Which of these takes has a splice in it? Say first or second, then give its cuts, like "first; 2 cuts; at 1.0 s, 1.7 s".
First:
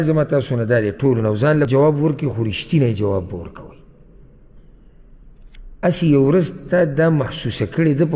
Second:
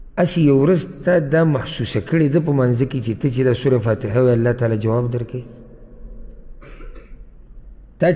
first; 1 cut; at 1.7 s